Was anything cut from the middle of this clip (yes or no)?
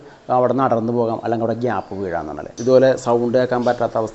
yes